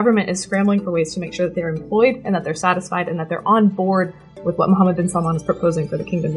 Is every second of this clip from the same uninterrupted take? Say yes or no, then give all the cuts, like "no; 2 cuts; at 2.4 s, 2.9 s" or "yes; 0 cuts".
yes; 0 cuts